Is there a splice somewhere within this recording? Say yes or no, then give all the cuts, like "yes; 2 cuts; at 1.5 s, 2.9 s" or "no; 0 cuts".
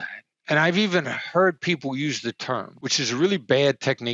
yes; 1 cut; at 2.7 s